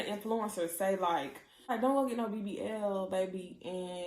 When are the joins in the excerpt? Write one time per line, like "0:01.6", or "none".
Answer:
0:01.7